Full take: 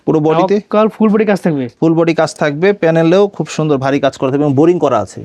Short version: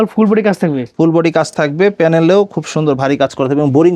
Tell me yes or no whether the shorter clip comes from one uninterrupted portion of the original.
yes